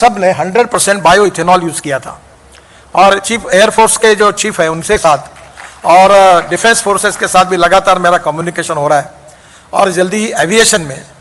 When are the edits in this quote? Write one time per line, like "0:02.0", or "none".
none